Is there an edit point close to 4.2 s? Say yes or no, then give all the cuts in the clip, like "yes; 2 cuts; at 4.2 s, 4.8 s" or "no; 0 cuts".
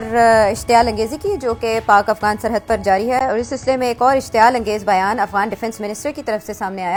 no; 0 cuts